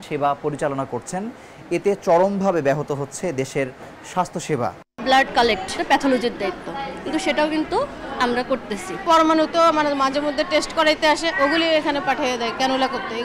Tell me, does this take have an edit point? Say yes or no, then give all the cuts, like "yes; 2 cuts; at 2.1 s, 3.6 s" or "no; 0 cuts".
yes; 2 cuts; at 4.9 s, 5.8 s